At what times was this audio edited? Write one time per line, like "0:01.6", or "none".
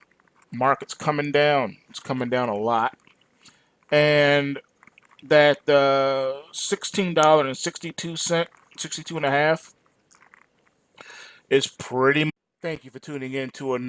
none